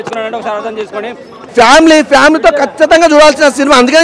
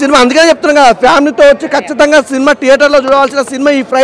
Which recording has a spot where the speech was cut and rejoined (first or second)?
first